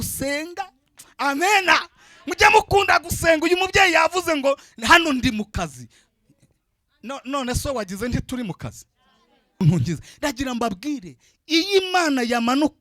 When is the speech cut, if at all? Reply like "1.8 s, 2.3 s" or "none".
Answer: 9.6 s